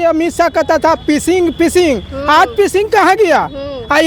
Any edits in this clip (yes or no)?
no